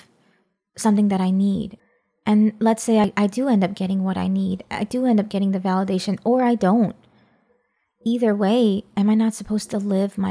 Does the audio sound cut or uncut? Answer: cut